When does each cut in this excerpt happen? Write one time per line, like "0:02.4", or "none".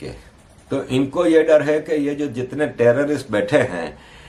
none